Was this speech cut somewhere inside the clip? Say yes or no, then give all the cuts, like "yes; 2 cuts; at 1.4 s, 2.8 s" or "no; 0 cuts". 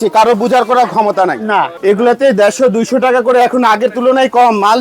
yes; 1 cut; at 1.7 s